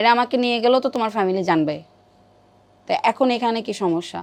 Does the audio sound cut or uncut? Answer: uncut